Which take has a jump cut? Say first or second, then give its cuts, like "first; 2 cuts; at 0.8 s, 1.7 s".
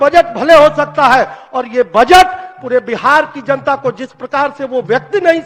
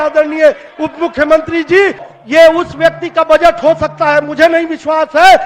second; 1 cut; at 2.0 s